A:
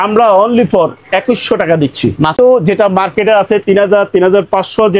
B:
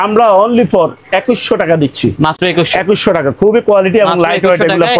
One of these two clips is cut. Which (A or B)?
A